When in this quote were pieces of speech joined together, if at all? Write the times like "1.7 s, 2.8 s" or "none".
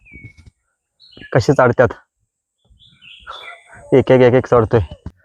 none